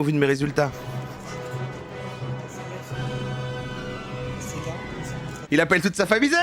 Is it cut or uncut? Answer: cut